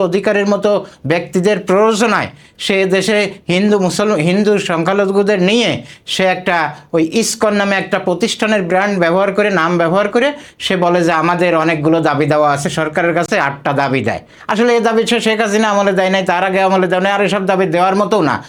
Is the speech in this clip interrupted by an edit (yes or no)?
no